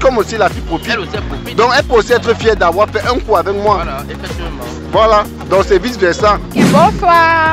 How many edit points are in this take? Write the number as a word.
zero